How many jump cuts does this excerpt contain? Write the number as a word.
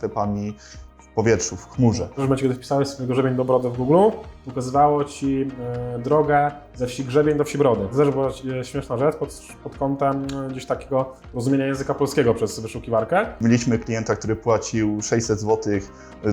three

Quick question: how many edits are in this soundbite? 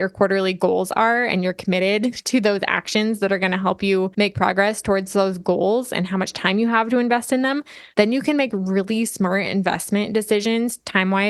one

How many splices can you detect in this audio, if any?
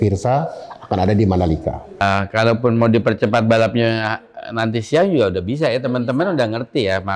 one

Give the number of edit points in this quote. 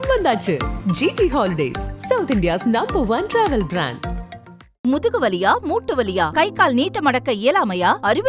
zero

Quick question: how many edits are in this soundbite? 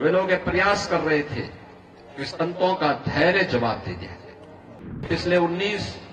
one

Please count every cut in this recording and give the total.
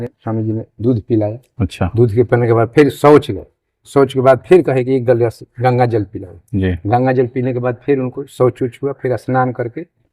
zero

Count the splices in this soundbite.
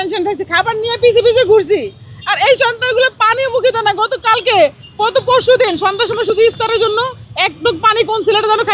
zero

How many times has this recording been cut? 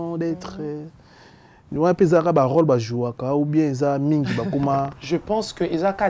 one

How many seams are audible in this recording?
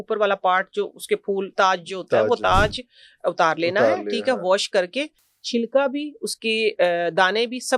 zero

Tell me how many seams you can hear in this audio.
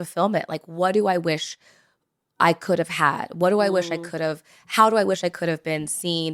zero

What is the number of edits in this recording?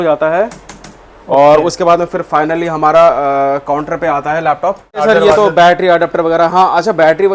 one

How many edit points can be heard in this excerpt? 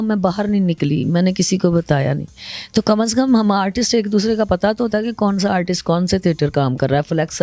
zero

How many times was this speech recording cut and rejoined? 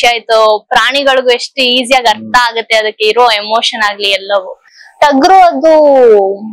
one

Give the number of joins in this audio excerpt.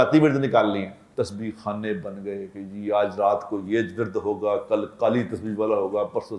one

